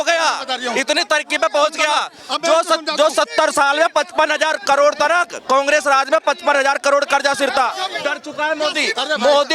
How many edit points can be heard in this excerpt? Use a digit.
1